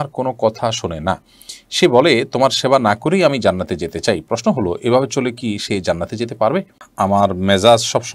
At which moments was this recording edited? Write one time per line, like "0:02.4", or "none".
0:06.8